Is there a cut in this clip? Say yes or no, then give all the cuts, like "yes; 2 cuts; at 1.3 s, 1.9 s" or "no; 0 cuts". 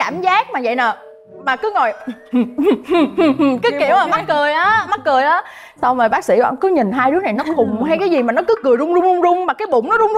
no; 0 cuts